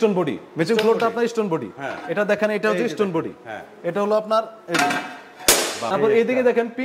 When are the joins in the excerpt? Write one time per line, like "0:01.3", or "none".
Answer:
0:05.9